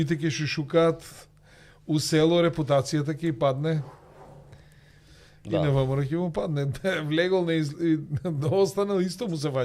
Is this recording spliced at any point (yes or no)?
no